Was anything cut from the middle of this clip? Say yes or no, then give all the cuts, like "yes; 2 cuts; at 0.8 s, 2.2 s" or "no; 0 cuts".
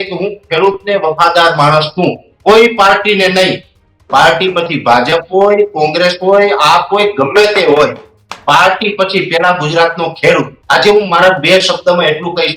yes; 1 cut; at 10.6 s